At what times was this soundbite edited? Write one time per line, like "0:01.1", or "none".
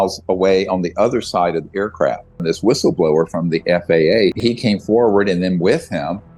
0:02.4
0:04.3